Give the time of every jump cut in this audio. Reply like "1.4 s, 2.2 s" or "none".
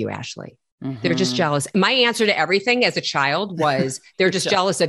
none